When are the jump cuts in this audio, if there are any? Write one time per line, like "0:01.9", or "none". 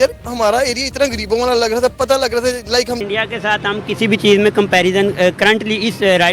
0:03.0

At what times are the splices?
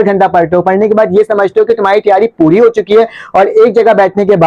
none

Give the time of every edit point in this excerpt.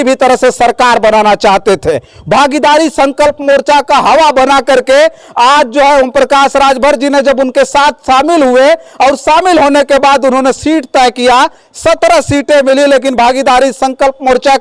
none

